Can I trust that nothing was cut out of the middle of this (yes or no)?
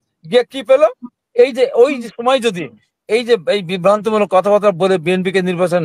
no